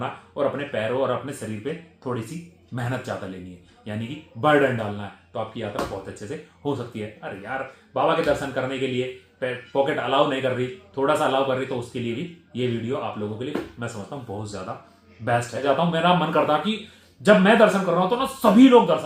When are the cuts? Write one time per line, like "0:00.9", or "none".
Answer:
0:15.6